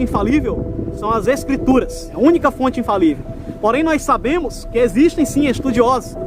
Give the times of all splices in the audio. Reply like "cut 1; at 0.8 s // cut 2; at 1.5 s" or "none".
cut 1; at 2.0 s